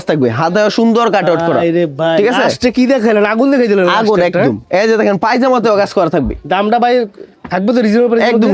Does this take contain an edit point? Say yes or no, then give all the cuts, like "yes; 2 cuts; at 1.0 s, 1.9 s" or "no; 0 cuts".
no; 0 cuts